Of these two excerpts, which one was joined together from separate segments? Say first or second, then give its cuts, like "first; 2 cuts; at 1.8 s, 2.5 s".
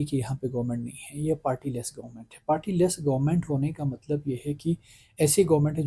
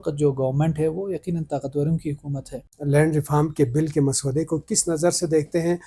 second; 1 cut; at 2.7 s